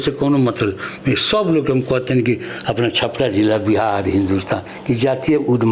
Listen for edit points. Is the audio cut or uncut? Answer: uncut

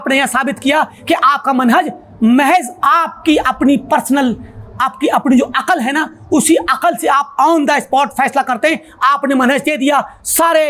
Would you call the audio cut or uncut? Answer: uncut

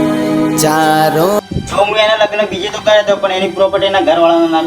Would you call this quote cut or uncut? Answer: cut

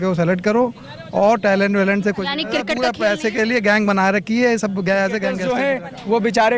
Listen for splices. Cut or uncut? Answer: cut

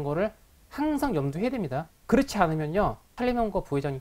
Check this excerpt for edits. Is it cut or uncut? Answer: cut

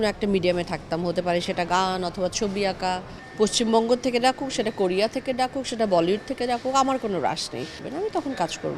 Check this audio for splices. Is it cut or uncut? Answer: cut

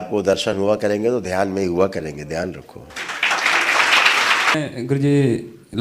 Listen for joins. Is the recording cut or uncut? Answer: cut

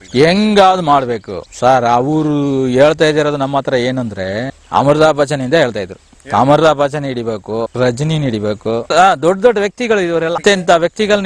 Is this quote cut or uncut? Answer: cut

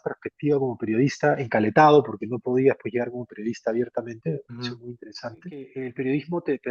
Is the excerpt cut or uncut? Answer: cut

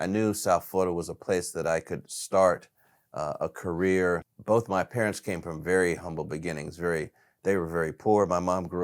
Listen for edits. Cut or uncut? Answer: cut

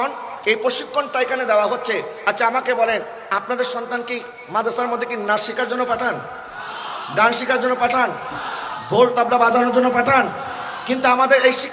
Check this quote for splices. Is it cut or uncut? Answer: uncut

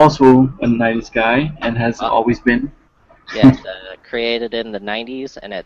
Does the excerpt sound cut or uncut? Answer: uncut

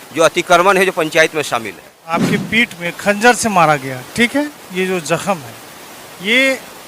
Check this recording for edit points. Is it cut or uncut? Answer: cut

